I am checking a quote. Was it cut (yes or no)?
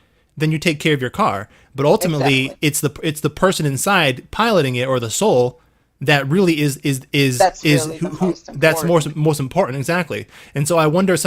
no